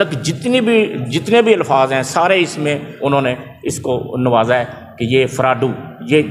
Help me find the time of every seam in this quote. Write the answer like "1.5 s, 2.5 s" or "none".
none